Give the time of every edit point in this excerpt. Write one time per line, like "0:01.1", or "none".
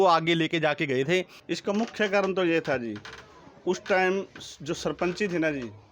0:01.4